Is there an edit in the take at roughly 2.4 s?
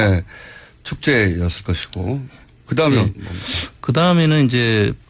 no; 1 cut; at 3.6 s

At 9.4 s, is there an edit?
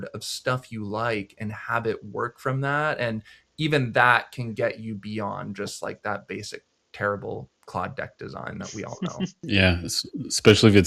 yes; 1 cut; at 9.4 s

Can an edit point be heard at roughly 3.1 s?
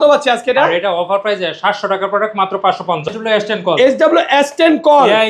yes; 1 cut; at 3.1 s

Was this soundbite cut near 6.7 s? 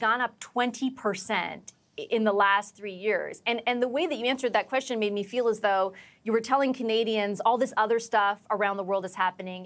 no; 0 cuts

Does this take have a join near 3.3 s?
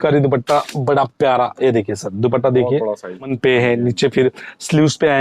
yes; 1 cut; at 3.3 s

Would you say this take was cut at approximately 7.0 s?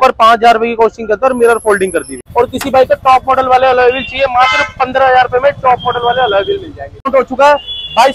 yes; 2 cuts; at 2.2 s, 7.0 s

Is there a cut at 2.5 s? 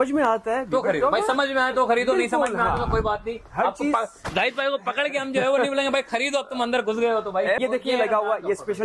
no; 1 cut; at 7.6 s

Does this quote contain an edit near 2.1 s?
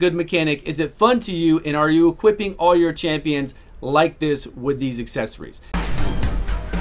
no; 1 cut; at 5.7 s

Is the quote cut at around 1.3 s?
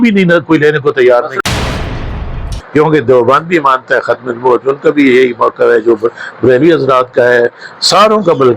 yes; 1 cut; at 1.3 s

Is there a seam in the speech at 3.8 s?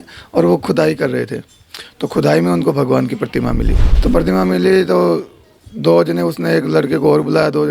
yes; 1 cut; at 3.8 s

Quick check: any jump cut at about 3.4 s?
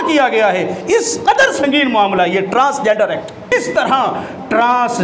yes; 1 cut; at 3.4 s

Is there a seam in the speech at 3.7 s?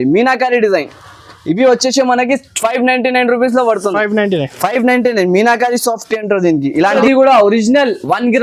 no; 1 cut; at 7.0 s

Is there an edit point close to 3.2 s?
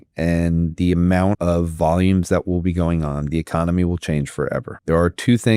no; 2 cuts; at 1.4 s, 4.7 s

